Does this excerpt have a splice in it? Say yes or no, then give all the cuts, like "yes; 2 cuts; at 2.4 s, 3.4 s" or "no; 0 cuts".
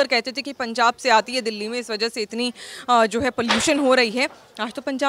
no; 0 cuts